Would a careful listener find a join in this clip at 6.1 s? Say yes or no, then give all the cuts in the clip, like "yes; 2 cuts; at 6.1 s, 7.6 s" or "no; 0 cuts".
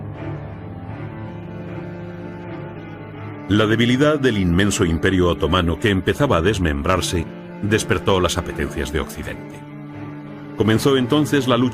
yes; 1 cut; at 6.1 s